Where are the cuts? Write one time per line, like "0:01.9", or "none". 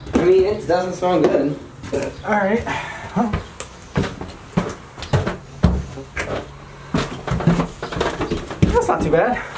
none